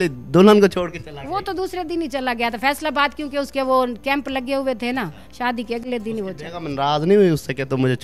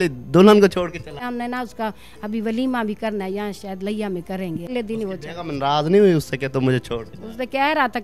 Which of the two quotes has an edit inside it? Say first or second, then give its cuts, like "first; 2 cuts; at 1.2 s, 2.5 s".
second; 2 cuts; at 1.2 s, 4.7 s